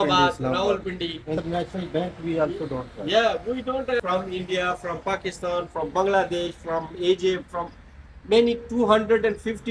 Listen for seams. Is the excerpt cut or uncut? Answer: cut